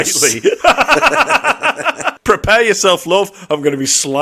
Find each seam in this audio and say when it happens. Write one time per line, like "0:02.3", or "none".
0:02.1